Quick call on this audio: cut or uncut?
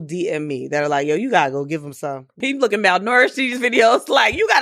cut